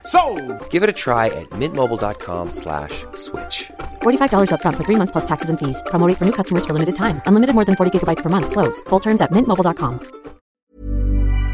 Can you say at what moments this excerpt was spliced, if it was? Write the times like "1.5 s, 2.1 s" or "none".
10.6 s